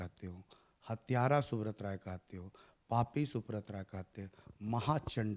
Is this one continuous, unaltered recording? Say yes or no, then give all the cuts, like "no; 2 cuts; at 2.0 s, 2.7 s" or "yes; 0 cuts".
yes; 0 cuts